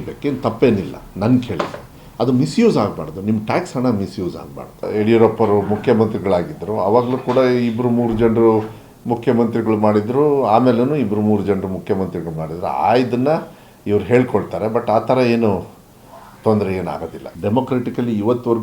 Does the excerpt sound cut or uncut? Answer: cut